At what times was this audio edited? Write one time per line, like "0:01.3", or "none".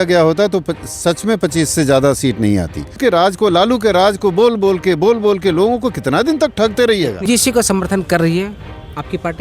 0:03.0
0:07.3